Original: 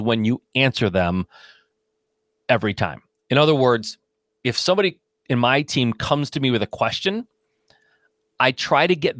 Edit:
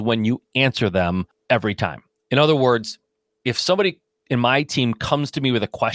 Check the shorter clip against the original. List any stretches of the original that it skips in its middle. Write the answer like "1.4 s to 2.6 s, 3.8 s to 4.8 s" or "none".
1.3 s to 2.3 s